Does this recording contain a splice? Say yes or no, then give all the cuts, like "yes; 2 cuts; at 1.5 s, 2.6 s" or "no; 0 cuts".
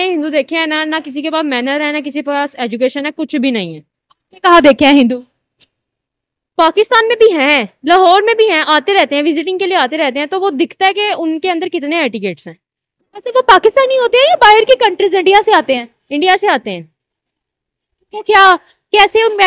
no; 0 cuts